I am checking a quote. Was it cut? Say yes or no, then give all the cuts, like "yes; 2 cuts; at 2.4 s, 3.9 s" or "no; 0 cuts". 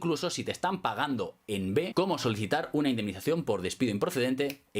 yes; 1 cut; at 1.9 s